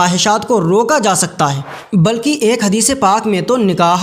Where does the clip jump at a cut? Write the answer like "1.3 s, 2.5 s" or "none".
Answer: 1.7 s